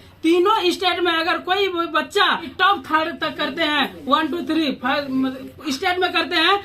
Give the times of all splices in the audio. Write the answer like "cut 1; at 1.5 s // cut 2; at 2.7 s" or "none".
cut 1; at 2.5 s